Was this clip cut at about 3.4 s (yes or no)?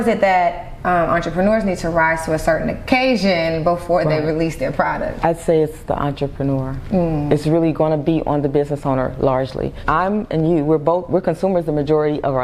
no